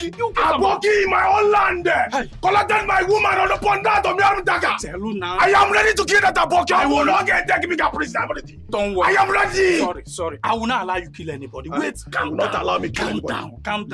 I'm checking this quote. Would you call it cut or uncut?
uncut